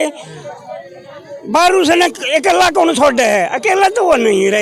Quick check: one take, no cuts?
yes; 0 cuts

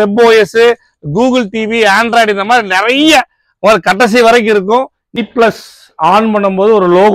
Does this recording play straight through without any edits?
no; 1 cut; at 5.0 s

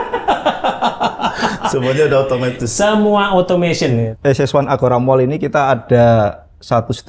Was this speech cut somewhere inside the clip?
yes; 1 cut; at 4.1 s

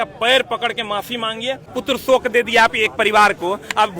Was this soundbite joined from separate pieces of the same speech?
yes; 1 cut; at 1.6 s

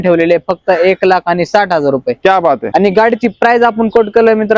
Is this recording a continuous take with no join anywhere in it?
no; 1 cut; at 2.6 s

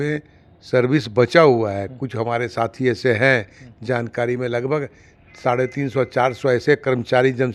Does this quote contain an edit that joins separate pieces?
no; 0 cuts

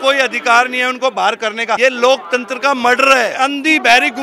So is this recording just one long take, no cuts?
no; 2 cuts; at 1.8 s, 3.3 s

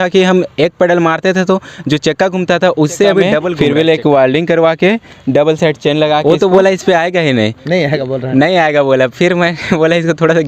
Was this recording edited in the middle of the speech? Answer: yes; 2 cuts; at 3.5 s, 6.2 s

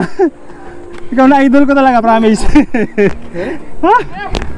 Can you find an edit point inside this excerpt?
no; 0 cuts

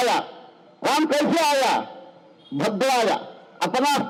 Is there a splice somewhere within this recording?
no; 0 cuts

